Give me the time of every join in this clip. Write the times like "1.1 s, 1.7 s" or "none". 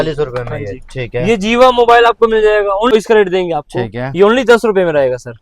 2.9 s